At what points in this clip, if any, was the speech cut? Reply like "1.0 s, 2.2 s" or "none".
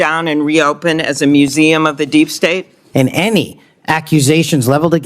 2.8 s